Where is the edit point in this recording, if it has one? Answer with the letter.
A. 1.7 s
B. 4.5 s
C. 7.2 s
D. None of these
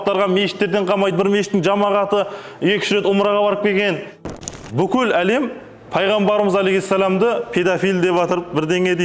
B